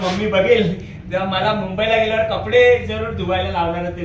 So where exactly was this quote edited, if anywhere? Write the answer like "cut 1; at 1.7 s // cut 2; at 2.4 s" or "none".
none